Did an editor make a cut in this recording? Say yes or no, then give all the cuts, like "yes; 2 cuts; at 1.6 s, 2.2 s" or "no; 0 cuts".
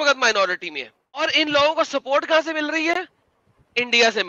yes; 1 cut; at 1.2 s